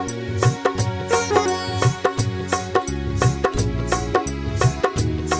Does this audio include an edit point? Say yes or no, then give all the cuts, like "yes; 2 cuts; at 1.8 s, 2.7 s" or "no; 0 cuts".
no; 0 cuts